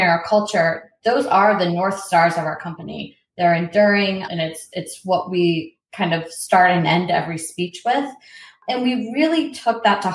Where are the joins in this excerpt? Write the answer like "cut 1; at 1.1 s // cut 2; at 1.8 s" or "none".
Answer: cut 1; at 4.3 s // cut 2; at 8.6 s